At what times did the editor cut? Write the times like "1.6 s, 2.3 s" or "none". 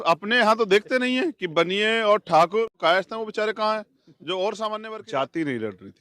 2.7 s, 4.9 s

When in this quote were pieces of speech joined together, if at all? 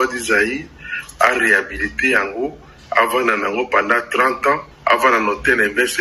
4.7 s

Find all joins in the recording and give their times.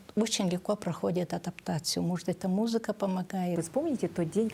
3.6 s

